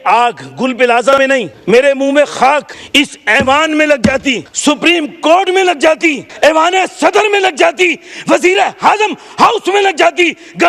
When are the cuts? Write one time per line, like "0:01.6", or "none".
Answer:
0:01.5
0:02.8
0:04.5
0:06.2